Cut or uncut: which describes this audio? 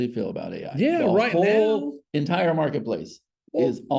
uncut